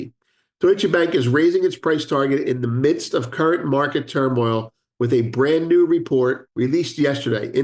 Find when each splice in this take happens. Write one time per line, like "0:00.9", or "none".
0:06.5